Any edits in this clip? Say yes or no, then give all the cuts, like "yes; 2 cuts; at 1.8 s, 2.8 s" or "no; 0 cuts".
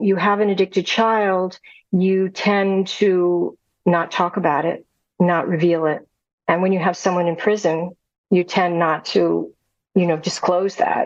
no; 0 cuts